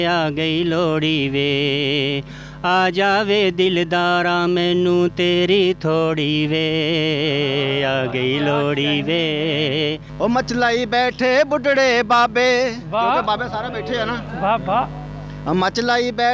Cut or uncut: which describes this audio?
uncut